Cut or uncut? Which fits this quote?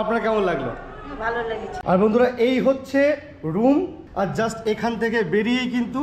cut